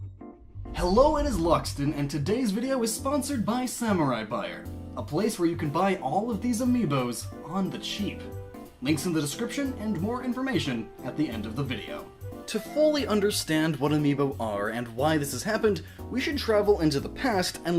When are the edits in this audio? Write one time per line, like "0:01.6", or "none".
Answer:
0:05.8